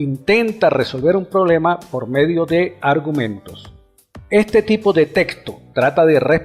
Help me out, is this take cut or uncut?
cut